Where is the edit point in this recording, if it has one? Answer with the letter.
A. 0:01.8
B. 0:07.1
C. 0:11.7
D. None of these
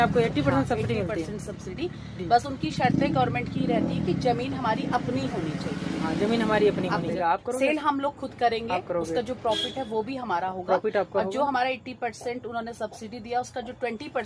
B